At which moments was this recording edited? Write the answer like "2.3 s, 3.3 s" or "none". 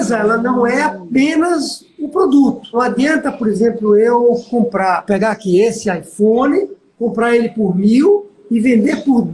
2.8 s, 5.0 s